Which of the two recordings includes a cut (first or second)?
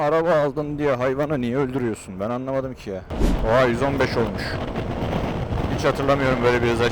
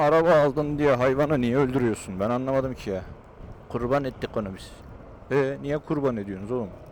first